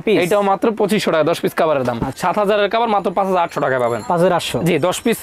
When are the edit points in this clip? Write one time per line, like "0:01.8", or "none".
0:02.1

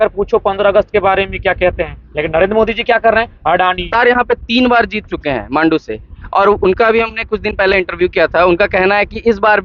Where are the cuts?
0:03.9

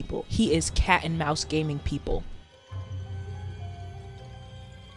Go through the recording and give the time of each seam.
0:02.5

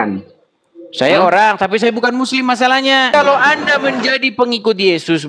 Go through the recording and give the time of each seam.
0:03.1

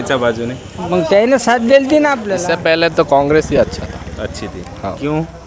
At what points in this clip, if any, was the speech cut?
0:02.3

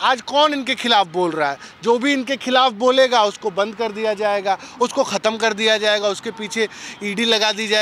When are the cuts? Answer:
none

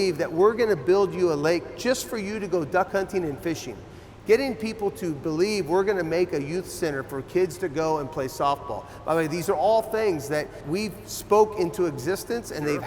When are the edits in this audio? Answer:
0:10.6

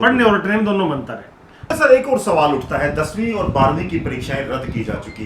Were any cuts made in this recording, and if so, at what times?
0:01.7

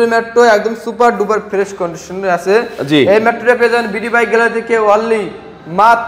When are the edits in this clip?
none

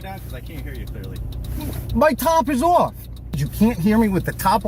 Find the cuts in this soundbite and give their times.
0:03.5

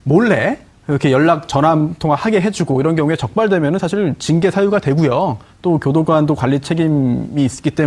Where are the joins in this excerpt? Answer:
none

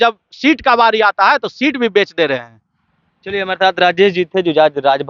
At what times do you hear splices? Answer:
none

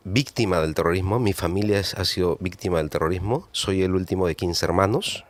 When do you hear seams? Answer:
none

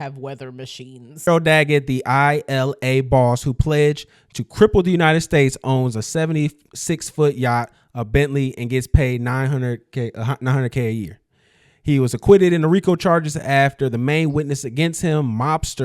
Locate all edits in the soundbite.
0:01.3

